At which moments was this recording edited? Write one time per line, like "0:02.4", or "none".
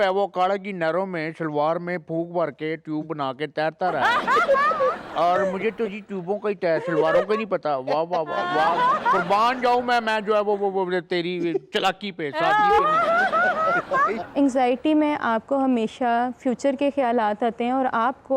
0:14.2